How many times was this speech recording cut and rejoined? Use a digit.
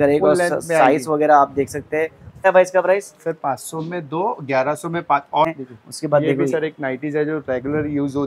2